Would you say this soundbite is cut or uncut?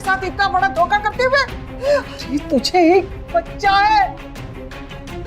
uncut